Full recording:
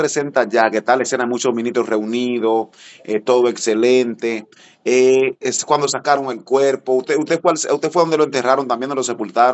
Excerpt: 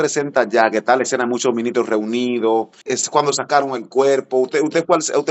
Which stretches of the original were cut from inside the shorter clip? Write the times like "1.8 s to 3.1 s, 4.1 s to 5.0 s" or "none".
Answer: 2.9 s to 5.5 s